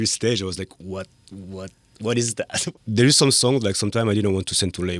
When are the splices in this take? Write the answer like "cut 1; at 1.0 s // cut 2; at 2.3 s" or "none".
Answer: cut 1; at 2.6 s